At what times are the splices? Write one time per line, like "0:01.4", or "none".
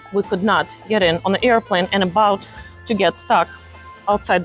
none